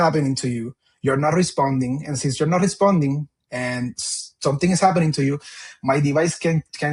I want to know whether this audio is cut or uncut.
uncut